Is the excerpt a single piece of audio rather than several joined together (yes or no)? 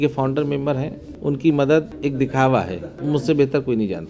no